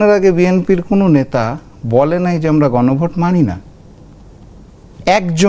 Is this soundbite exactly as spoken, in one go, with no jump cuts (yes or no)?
yes